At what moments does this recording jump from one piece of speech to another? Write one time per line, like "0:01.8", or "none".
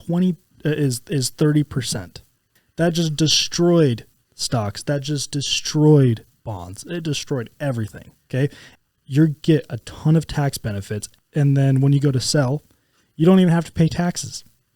0:02.6
0:08.6
0:11.0